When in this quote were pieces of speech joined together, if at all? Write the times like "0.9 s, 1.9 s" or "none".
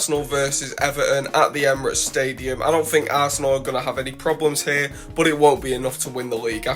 none